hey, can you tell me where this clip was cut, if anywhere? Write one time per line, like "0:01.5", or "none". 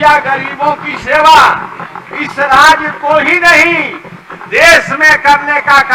none